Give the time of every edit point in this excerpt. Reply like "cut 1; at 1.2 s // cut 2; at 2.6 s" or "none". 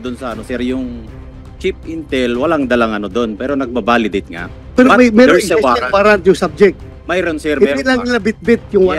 none